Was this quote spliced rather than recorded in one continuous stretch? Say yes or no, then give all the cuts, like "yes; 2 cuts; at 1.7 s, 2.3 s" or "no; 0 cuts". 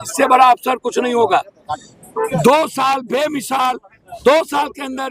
yes; 1 cut; at 1.7 s